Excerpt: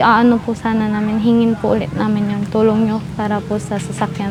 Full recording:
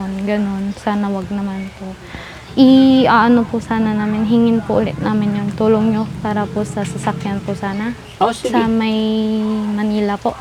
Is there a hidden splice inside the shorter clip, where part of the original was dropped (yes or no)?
no